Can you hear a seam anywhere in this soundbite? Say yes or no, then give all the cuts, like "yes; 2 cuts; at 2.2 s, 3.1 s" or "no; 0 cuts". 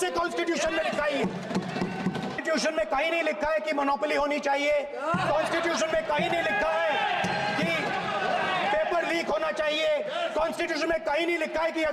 yes; 1 cut; at 2.4 s